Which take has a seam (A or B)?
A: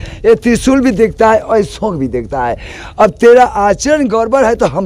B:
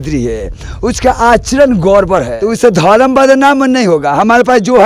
B